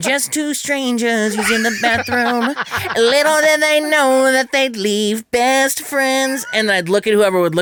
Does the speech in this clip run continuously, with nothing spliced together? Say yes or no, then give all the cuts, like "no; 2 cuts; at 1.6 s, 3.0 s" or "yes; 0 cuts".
yes; 0 cuts